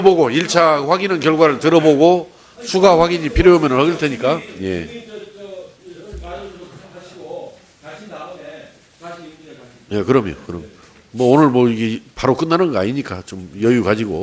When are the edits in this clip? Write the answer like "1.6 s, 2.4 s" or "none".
6.7 s